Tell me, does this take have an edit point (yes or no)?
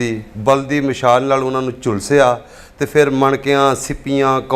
no